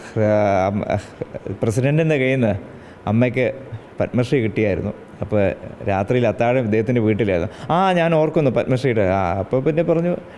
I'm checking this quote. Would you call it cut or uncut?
uncut